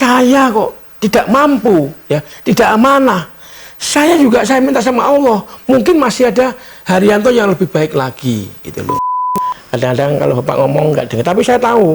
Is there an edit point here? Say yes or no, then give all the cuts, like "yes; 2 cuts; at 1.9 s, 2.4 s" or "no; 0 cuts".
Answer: yes; 1 cut; at 9.2 s